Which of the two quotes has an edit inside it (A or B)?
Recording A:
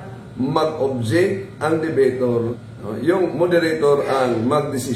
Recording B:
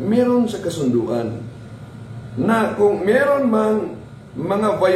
A